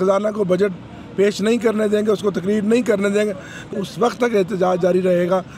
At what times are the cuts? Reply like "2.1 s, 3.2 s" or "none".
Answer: 3.7 s